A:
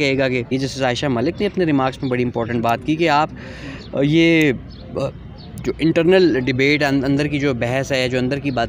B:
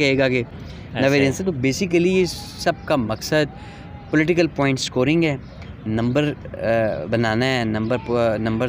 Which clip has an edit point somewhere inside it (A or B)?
A